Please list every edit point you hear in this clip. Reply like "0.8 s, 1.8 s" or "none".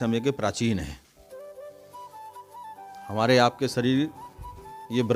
none